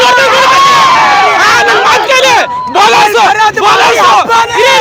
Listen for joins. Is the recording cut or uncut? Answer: uncut